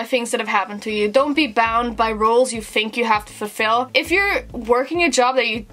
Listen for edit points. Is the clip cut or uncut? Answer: uncut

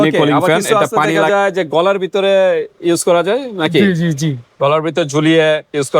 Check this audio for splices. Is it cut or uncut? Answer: cut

